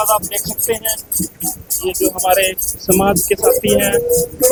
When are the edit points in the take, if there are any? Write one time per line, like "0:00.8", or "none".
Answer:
none